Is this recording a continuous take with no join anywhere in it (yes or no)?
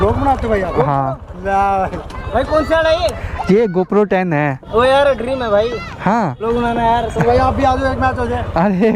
yes